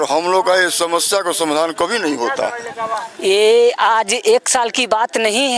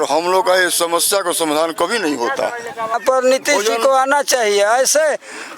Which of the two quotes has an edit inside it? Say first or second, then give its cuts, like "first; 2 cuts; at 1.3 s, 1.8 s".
second; 1 cut; at 3.0 s